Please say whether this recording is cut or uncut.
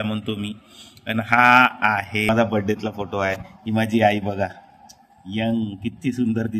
cut